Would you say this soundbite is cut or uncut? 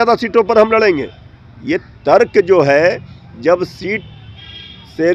uncut